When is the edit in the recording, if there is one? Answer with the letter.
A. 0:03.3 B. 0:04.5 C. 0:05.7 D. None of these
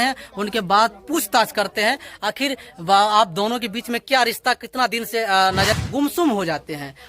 C